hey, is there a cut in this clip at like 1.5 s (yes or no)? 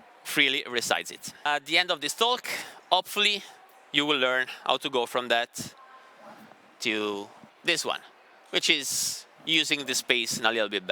yes